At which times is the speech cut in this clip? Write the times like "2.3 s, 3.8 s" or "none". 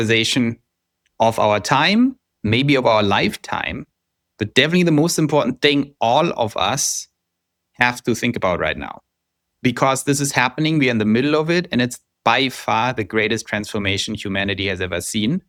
none